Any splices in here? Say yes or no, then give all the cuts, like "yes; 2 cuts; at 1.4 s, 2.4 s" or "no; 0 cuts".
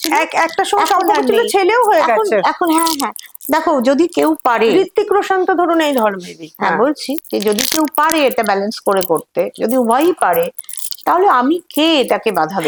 no; 0 cuts